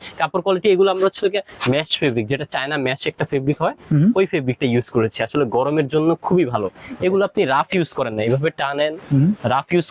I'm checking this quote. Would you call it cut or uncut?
uncut